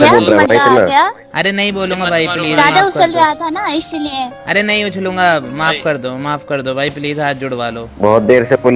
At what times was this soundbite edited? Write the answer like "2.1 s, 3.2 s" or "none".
none